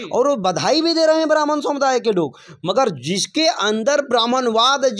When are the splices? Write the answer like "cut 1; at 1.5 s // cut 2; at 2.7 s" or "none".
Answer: none